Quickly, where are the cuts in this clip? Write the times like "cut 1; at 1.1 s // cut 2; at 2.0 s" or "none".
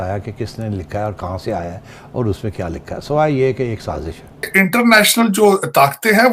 cut 1; at 4.5 s